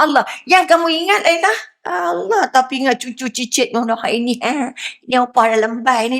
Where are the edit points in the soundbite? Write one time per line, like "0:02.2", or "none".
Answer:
0:01.7

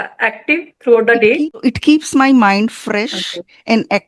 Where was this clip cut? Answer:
none

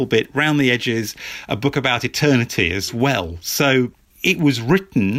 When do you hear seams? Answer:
0:04.0

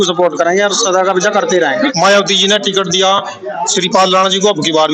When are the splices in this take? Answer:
0:01.9

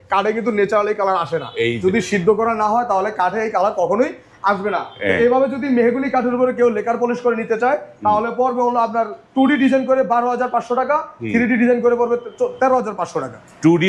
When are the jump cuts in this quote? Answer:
none

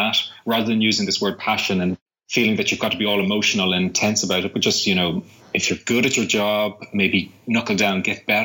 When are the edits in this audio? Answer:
0:02.1

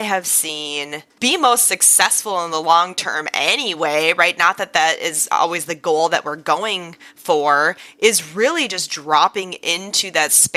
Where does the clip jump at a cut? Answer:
0:01.0

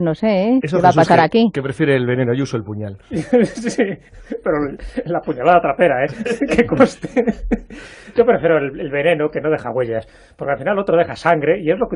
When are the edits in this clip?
0:09.6

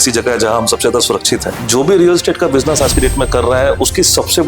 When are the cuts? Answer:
0:01.6

